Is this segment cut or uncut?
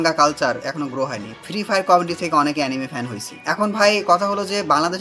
cut